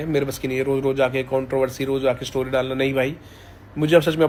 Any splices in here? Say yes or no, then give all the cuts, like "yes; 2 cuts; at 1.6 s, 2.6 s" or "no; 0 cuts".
no; 0 cuts